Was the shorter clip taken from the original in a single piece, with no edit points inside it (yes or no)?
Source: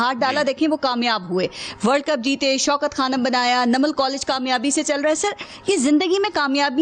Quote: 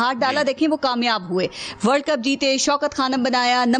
yes